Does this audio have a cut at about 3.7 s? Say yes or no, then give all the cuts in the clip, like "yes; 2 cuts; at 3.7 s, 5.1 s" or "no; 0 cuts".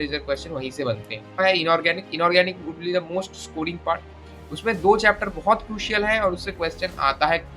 no; 1 cut; at 1.4 s